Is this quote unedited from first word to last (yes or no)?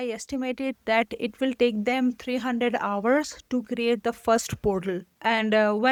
yes